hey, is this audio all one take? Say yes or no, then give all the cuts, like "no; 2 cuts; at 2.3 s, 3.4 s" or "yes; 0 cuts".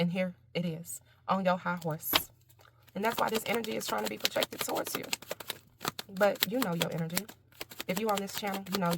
no; 1 cut; at 3.3 s